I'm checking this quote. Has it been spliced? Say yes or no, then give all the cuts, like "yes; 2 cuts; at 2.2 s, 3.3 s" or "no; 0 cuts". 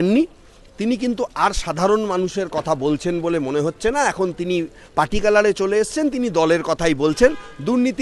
no; 0 cuts